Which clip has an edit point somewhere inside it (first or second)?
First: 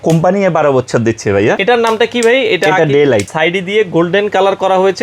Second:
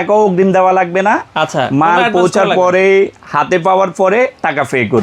first